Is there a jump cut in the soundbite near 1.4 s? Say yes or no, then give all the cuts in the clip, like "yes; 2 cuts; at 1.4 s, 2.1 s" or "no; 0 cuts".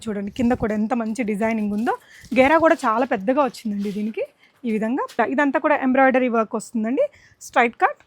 no; 1 cut; at 5.2 s